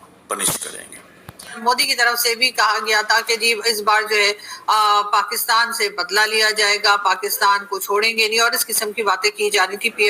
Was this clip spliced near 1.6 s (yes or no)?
yes